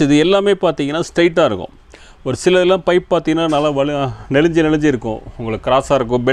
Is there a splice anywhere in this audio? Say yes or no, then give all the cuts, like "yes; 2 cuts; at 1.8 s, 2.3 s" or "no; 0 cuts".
no; 0 cuts